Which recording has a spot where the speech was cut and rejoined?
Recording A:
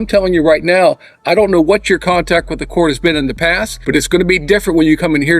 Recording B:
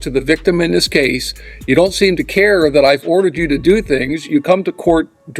A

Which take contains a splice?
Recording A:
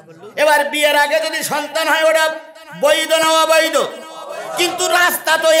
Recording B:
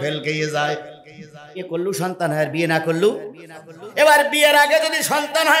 B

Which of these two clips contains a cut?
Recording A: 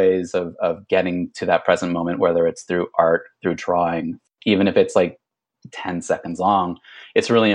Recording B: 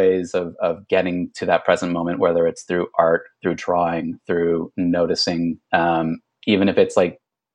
A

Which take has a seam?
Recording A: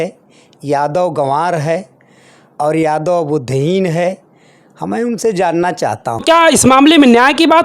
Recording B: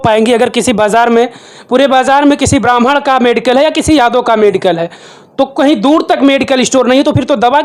A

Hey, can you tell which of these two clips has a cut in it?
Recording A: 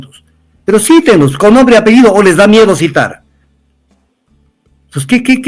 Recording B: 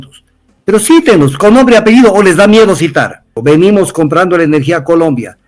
B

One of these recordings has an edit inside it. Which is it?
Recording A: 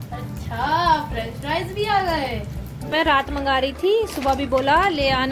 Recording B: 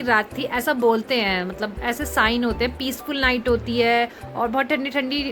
A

